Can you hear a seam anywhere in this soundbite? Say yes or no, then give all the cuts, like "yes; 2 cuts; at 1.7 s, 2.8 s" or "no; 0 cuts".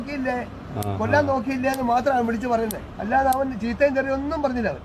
yes; 1 cut; at 2.9 s